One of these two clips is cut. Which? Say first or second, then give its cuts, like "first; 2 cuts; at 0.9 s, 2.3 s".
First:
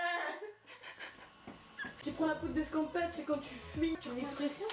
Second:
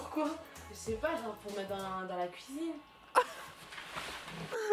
first; 1 cut; at 1.9 s